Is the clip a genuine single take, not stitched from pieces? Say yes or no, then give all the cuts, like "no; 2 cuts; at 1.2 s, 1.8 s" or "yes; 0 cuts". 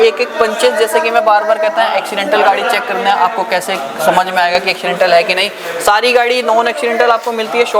yes; 0 cuts